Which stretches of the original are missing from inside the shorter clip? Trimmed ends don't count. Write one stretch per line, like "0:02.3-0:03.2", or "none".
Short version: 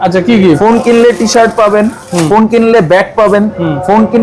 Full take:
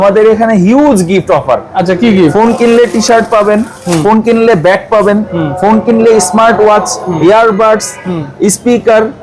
none